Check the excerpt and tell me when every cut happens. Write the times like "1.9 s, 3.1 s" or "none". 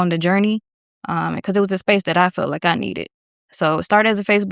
none